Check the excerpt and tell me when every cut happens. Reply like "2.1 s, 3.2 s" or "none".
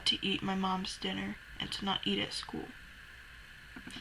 none